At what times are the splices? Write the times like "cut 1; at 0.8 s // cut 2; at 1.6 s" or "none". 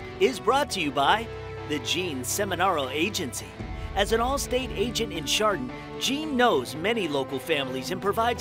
none